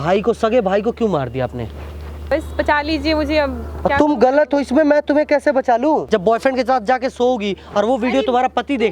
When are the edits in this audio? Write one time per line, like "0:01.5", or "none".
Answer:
0:02.3
0:06.0